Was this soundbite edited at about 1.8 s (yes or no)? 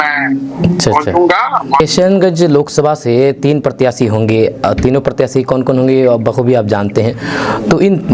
yes